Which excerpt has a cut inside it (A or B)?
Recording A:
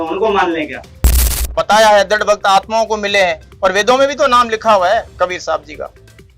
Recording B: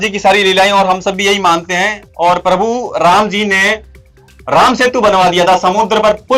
A